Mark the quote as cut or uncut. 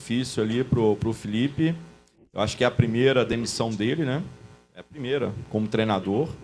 uncut